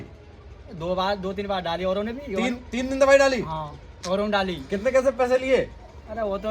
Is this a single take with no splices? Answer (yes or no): yes